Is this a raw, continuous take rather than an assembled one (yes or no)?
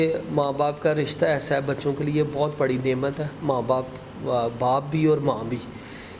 yes